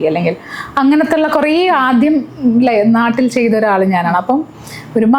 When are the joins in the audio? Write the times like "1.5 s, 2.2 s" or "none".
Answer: none